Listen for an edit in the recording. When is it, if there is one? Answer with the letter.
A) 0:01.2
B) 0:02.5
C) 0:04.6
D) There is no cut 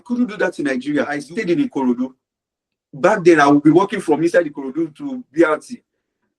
A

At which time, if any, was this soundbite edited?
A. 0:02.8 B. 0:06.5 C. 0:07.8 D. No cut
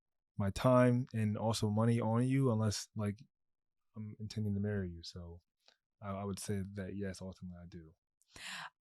D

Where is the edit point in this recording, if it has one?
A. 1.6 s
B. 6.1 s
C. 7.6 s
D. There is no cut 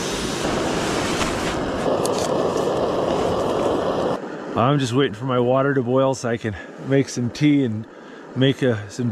D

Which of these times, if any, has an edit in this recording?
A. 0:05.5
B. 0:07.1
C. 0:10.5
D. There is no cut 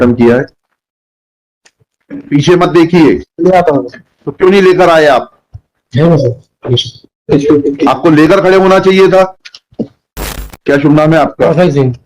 C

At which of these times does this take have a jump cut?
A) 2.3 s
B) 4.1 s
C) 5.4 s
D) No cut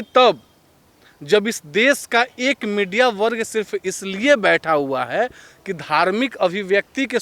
D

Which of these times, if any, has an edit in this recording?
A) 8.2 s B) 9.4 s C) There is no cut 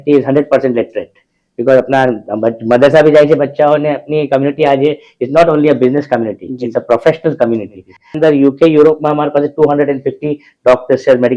A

